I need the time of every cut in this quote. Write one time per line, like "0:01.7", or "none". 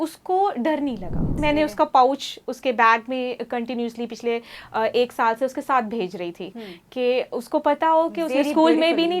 0:01.4